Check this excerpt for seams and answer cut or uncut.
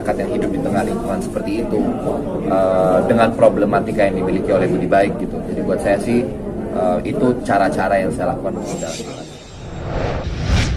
cut